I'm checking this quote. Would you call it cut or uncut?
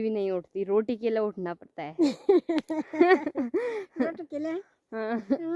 uncut